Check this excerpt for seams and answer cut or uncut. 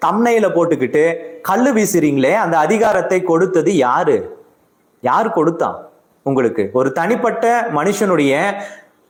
uncut